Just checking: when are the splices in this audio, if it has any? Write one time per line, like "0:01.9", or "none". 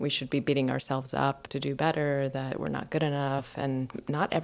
0:01.5
0:02.5
0:03.5

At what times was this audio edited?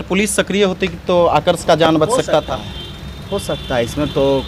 none

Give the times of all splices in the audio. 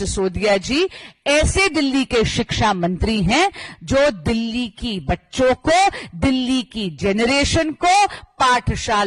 none

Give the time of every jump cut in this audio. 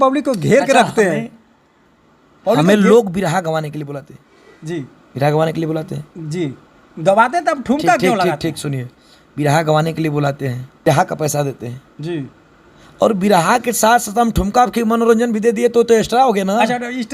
0:10.9

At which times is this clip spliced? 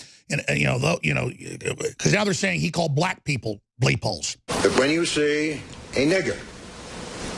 0:04.5

